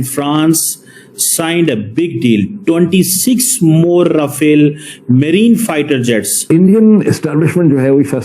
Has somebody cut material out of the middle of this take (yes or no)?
yes